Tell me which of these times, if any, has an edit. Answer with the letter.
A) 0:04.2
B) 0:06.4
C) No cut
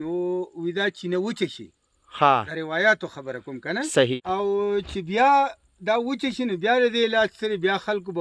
A